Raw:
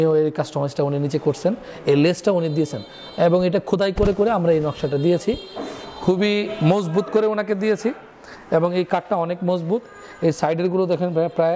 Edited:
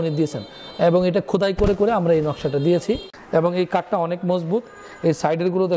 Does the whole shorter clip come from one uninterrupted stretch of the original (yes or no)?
no